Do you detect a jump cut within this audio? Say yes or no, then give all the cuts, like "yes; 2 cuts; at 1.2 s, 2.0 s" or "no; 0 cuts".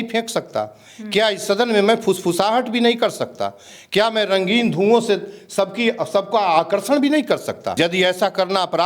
yes; 1 cut; at 7.7 s